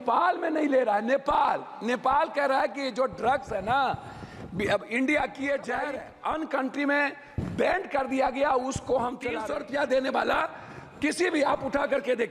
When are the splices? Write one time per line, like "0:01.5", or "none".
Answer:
0:06.1
0:09.3